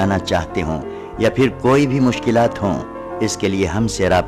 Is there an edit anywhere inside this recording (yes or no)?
no